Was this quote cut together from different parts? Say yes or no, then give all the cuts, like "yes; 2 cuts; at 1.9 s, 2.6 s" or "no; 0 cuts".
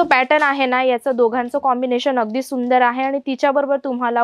no; 0 cuts